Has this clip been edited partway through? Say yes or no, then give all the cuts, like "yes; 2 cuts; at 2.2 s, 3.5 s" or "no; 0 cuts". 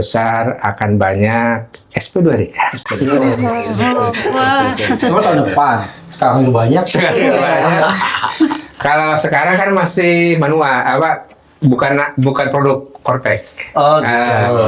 no; 0 cuts